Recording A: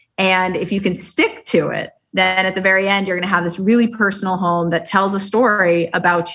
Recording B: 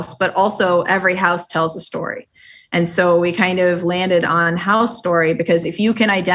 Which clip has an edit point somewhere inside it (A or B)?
A